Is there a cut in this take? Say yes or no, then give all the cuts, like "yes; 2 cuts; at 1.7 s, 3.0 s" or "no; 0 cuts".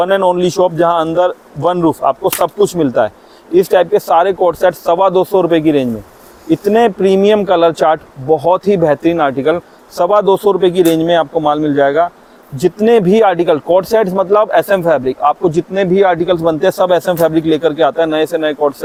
no; 0 cuts